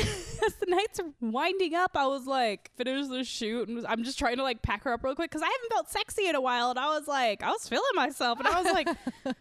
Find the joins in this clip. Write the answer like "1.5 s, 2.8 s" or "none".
1.1 s, 2.7 s

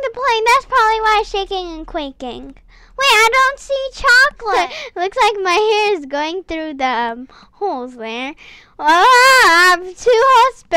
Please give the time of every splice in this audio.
4.6 s

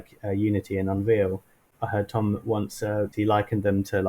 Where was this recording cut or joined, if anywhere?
1.6 s, 3.1 s

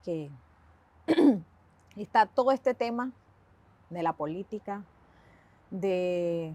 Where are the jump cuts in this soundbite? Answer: none

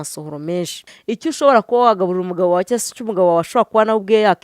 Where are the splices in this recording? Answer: 1.0 s

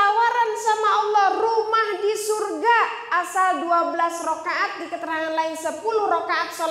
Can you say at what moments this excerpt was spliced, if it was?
none

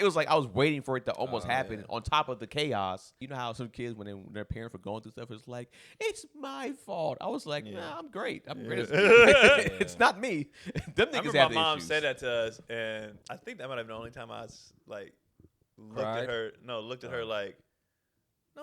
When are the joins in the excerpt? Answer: 3.3 s, 13.2 s

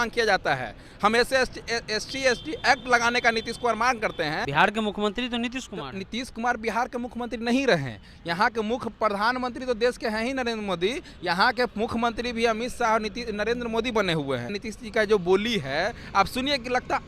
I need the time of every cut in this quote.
4.4 s, 14.6 s

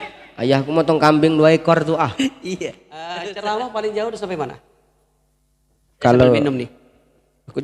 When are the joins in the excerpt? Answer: 3.2 s

